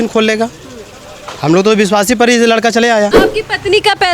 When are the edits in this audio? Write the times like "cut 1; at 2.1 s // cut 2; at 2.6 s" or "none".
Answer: cut 1; at 3.2 s

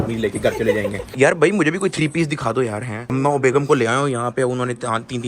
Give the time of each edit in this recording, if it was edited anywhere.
cut 1; at 1.0 s

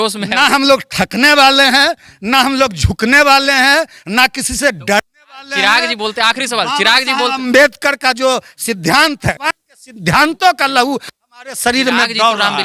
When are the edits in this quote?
cut 1; at 9.4 s

